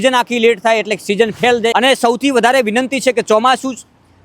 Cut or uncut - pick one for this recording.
cut